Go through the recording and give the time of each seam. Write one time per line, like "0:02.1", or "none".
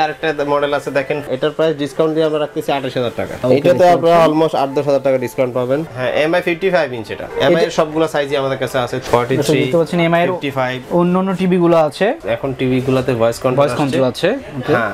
0:01.3
0:03.4
0:05.9
0:09.0
0:12.2